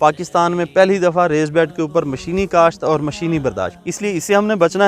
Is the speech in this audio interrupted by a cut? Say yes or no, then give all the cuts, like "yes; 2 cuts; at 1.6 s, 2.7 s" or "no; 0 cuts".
yes; 1 cut; at 3.7 s